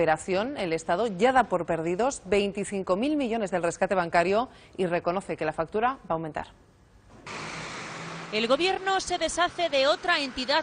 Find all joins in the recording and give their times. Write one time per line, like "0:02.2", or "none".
0:07.3